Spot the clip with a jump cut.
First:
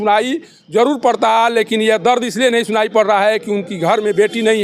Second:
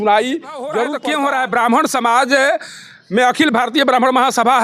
second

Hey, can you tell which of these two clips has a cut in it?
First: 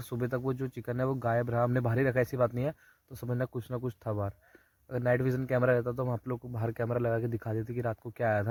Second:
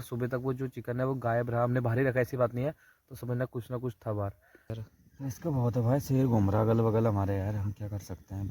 second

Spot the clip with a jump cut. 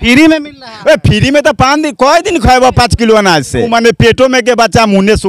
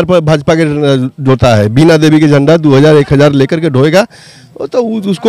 first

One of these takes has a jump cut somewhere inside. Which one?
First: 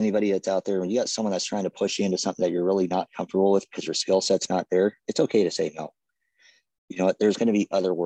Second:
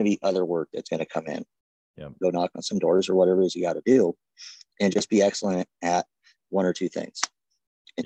second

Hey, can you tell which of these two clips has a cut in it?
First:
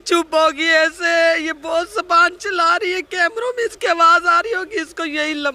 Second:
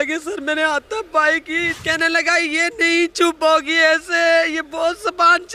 second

